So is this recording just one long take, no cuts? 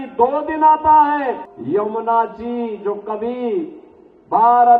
no; 1 cut; at 1.5 s

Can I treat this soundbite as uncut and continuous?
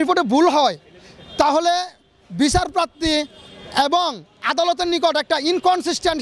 yes; 0 cuts

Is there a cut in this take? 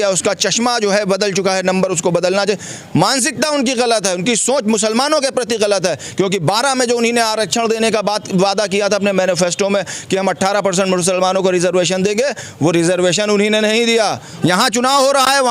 yes; 1 cut; at 14.3 s

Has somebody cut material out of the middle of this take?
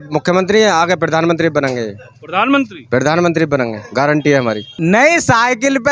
yes; 1 cut; at 4.7 s

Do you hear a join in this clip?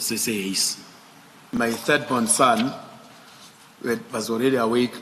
yes; 1 cut; at 1.4 s

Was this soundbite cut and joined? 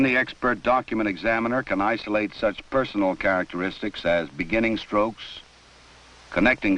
yes; 1 cut; at 2.8 s

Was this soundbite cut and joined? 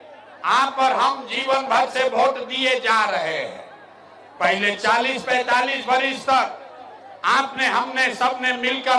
no; 0 cuts

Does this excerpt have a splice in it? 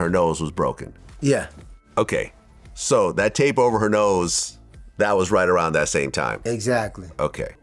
no; 0 cuts

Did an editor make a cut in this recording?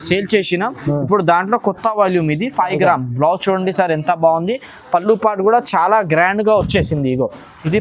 no; 0 cuts

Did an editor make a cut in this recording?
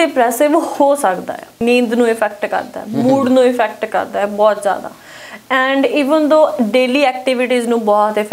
yes; 1 cut; at 1.6 s

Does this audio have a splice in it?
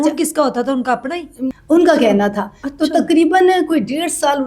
yes; 1 cut; at 1.5 s

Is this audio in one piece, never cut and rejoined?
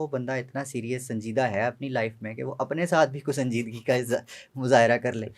yes; 0 cuts

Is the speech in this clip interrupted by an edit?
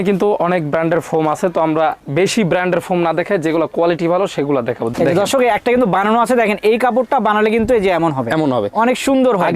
yes; 1 cut; at 4.9 s

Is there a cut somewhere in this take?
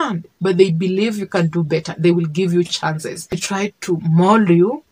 no; 0 cuts

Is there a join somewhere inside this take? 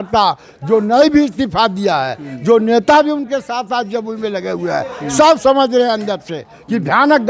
no; 0 cuts

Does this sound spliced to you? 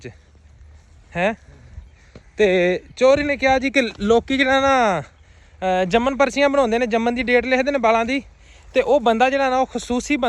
no; 0 cuts

